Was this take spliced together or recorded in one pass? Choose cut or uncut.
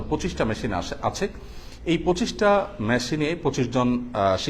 uncut